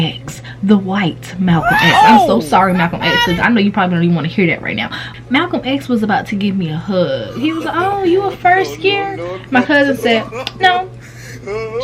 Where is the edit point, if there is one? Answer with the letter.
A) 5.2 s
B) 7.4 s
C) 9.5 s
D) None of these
A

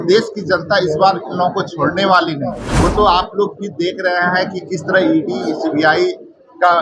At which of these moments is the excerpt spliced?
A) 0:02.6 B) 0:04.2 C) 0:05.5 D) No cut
A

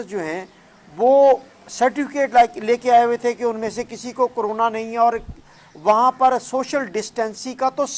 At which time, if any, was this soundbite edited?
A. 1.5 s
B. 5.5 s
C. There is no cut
C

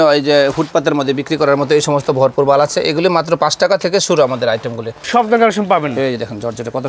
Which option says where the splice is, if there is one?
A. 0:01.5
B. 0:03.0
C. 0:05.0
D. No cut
C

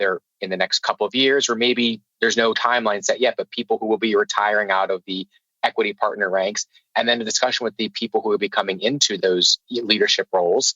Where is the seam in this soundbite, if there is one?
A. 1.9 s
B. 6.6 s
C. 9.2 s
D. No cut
C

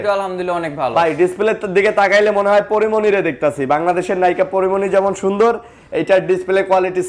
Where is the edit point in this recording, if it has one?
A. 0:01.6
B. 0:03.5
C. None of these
C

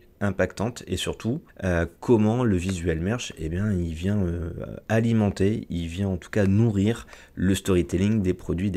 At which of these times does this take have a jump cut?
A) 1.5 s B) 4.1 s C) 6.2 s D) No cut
A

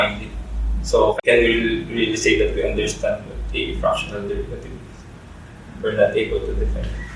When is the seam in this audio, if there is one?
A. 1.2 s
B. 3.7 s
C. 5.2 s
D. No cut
A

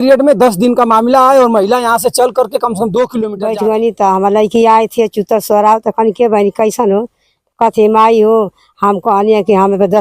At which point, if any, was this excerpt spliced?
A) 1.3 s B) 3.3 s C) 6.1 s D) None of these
B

